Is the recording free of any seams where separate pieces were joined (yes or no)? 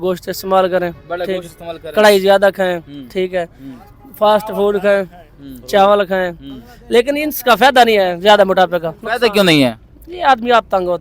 yes